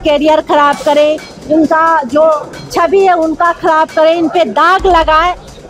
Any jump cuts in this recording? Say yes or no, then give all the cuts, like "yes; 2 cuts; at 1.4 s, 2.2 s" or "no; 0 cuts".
no; 0 cuts